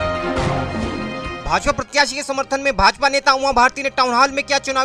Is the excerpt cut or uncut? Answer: cut